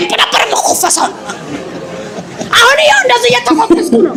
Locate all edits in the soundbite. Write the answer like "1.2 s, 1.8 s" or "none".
none